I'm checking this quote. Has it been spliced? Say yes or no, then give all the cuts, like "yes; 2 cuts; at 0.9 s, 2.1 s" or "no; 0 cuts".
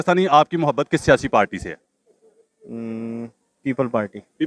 no; 0 cuts